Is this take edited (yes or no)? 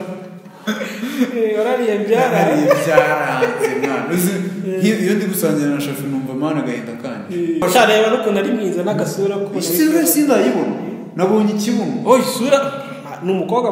yes